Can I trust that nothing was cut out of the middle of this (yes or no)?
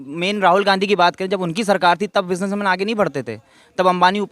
yes